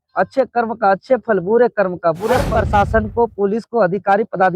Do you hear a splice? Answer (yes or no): yes